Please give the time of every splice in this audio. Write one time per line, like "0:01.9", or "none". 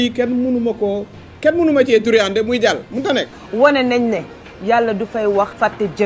0:03.3